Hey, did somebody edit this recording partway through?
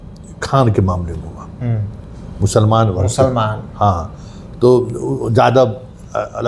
no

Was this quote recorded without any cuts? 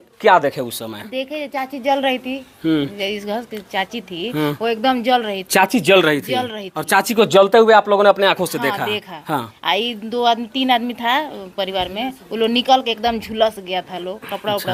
yes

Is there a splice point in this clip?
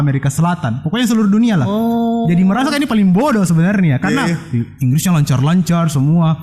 no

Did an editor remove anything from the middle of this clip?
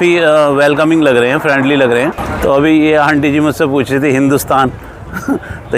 yes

